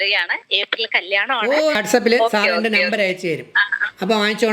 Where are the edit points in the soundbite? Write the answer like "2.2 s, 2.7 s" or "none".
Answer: 1.8 s